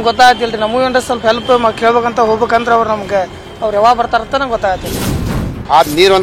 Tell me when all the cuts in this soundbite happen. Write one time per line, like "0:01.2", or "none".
0:05.2